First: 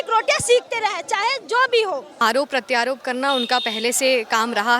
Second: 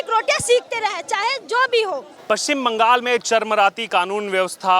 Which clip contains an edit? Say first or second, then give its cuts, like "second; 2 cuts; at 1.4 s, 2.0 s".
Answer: first; 1 cut; at 2.2 s